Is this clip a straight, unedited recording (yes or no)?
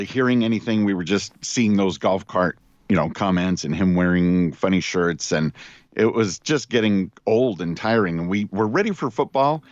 no